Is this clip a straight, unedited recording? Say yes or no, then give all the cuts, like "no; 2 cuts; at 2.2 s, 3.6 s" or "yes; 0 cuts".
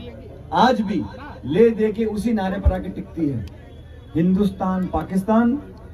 yes; 0 cuts